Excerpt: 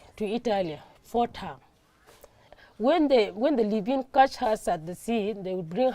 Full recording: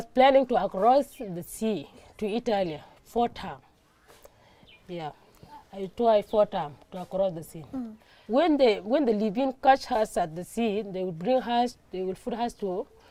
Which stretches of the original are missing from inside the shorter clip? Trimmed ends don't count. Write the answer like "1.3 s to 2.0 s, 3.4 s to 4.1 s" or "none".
4.6 s to 8.1 s